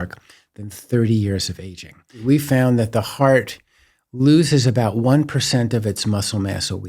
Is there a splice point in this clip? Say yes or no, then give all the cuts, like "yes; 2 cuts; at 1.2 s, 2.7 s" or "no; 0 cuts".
yes; 1 cut; at 2.2 s